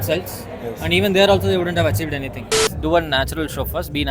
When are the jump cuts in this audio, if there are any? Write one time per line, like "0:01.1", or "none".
0:02.7

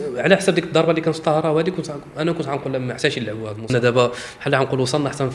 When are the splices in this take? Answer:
0:03.7

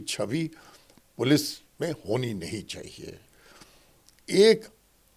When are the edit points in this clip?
none

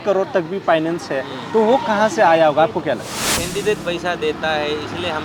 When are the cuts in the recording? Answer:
0:03.3

